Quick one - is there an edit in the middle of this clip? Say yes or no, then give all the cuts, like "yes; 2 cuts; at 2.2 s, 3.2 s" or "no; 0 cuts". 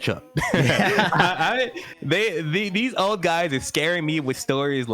no; 0 cuts